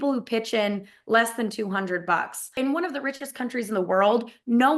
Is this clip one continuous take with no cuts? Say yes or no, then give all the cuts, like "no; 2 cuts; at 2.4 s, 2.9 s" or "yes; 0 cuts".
no; 1 cut; at 2.4 s